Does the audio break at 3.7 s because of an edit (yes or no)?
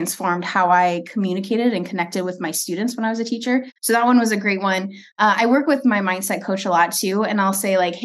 yes